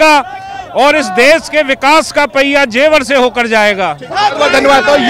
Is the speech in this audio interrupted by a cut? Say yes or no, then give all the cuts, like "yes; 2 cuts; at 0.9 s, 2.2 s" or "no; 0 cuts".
no; 0 cuts